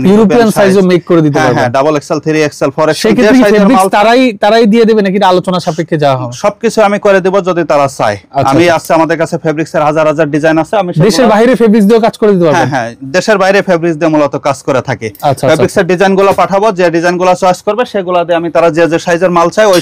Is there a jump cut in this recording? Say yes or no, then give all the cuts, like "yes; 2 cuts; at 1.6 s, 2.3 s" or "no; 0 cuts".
no; 0 cuts